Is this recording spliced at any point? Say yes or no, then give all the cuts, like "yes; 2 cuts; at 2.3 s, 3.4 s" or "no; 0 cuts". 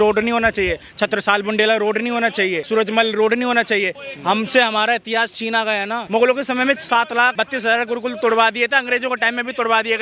yes; 4 cuts; at 2.6 s, 4.0 s, 6.0 s, 7.3 s